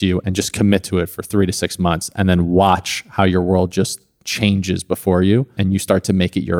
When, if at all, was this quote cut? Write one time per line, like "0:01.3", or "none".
0:05.5